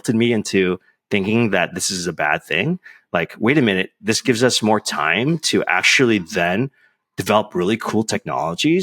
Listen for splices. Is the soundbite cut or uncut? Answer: uncut